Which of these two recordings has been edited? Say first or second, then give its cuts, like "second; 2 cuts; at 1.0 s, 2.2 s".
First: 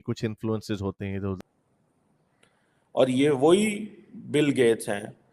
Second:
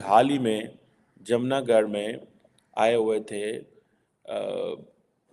first; 1 cut; at 1.4 s